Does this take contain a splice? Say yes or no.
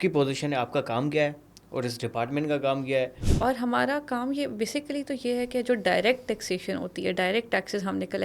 yes